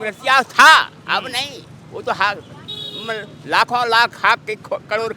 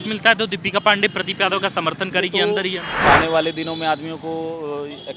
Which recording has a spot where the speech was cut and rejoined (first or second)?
second